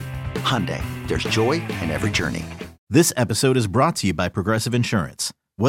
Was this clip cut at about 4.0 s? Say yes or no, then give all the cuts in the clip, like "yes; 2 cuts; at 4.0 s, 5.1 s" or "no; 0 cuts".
no; 1 cut; at 2.7 s